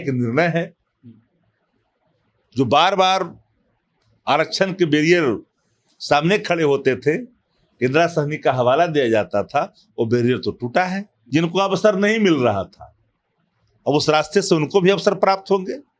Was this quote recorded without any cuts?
no; 1 cut; at 11.1 s

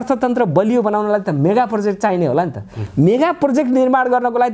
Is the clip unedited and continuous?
yes; 0 cuts

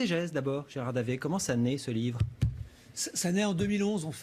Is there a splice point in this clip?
yes; 1 cut; at 1.8 s

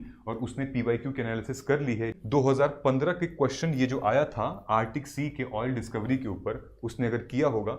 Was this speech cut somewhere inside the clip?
yes; 1 cut; at 2.2 s

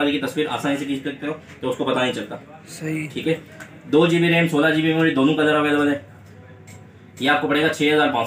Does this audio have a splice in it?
no; 0 cuts

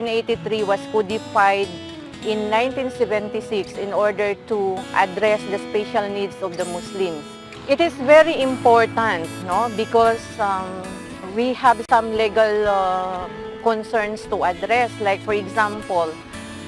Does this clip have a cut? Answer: yes; 1 cut; at 7.6 s

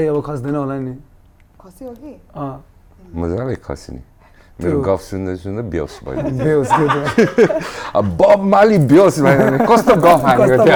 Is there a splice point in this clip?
no; 0 cuts

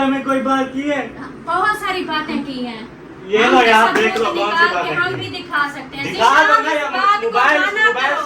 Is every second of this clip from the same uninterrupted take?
yes; 0 cuts

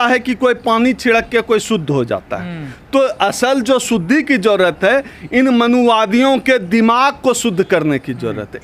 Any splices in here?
no; 0 cuts

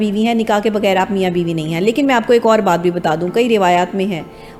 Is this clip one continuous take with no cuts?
yes; 0 cuts

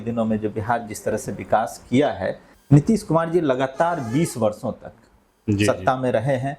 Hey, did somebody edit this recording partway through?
yes; 1 cut; at 2.5 s

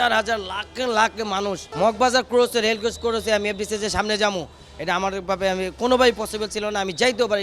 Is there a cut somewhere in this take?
yes; 1 cut; at 1.6 s

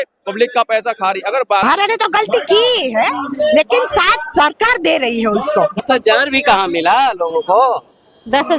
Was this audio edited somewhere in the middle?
yes; 2 cuts; at 1.6 s, 5.8 s

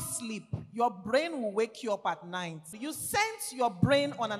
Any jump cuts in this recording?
yes; 1 cut; at 2.7 s

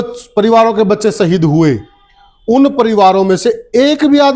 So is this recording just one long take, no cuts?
yes; 0 cuts

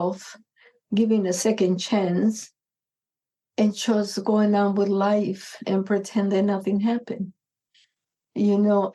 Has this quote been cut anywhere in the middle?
no; 0 cuts

